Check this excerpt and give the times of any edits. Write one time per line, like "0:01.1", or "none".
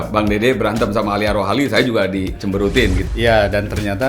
0:03.0